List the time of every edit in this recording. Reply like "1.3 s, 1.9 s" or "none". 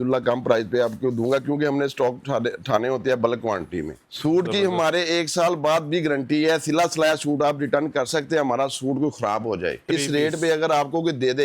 4.0 s, 9.9 s